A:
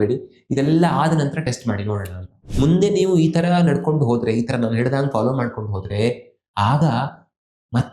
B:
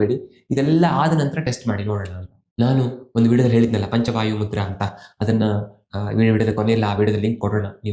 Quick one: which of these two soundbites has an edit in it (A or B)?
A